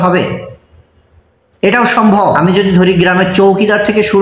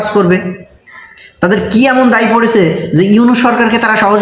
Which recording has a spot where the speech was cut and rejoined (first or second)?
first